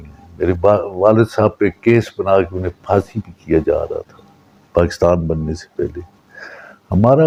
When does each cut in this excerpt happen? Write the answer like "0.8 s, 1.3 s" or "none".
none